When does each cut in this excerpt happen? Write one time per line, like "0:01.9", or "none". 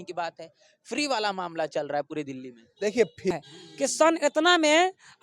0:03.4